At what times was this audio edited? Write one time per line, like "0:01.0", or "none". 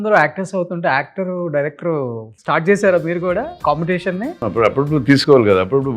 0:02.3
0:03.5
0:04.4

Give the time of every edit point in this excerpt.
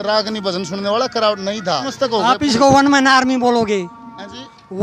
0:01.9

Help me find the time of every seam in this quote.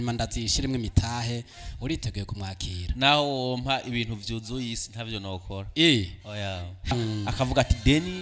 0:06.9

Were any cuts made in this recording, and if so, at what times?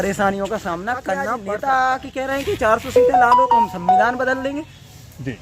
0:01.3

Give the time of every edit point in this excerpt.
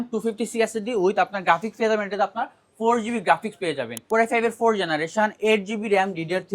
0:03.9

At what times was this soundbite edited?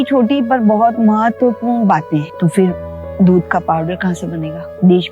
0:02.2

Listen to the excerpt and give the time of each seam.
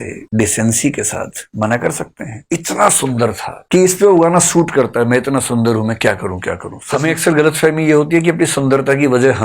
0:02.3
0:06.7

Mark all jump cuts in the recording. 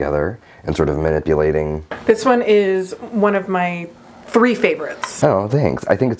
0:01.8

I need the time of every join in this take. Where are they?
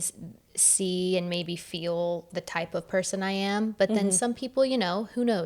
none

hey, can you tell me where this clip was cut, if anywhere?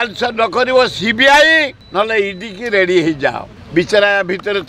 0:01.8
0:03.5

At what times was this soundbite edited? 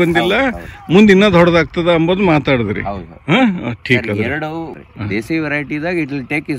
0:04.8

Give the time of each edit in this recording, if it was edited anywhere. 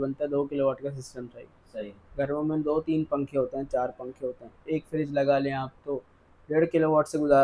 none

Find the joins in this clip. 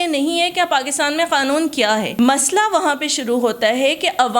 0:02.1

